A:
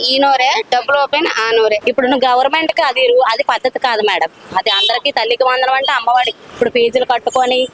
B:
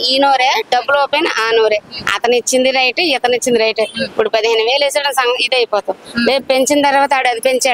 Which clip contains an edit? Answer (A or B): A